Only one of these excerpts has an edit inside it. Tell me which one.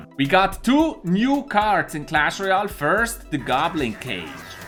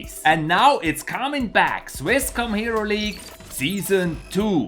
second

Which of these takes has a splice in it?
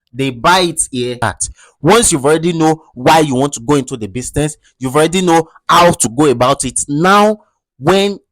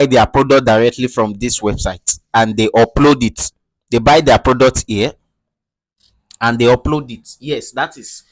first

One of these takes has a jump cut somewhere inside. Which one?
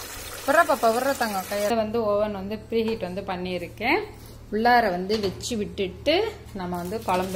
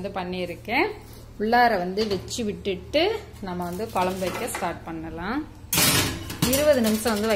first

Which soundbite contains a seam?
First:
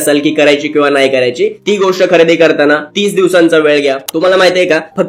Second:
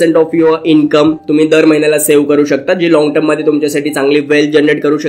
first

